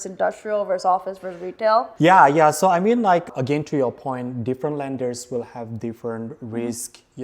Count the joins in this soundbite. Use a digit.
2